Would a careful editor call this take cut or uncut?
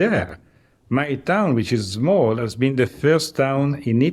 uncut